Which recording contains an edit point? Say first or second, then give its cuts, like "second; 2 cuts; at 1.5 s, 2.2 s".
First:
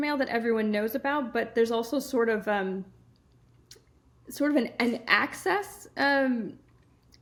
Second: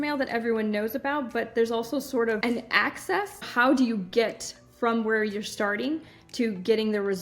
second; 2 cuts; at 2.4 s, 3.5 s